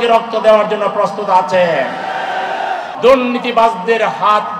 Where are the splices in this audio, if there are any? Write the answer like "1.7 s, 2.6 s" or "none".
2.9 s